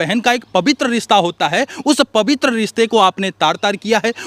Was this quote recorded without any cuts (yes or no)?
yes